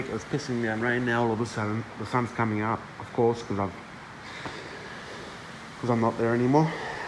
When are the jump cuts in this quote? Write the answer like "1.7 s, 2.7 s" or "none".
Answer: none